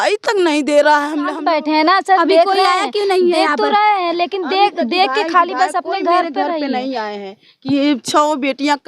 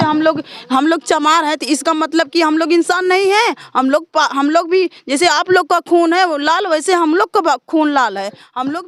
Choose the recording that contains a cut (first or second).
first